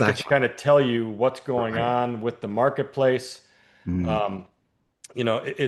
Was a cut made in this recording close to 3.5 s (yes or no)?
no